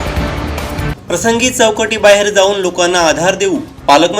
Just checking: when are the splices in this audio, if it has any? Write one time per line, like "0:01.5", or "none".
0:01.0

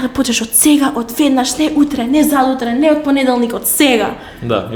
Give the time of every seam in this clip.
none

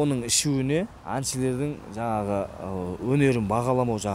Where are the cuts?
0:01.0

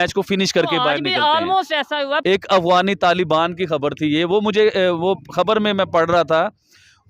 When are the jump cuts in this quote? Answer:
0:02.2

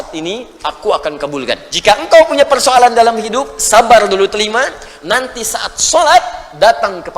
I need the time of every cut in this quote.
0:01.7

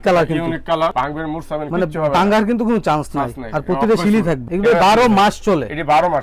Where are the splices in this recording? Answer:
0:00.9
0:04.4

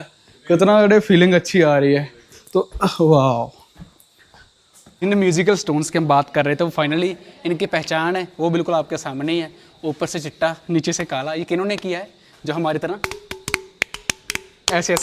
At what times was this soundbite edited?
0:05.2

